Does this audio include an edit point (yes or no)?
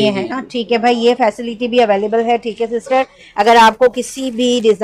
no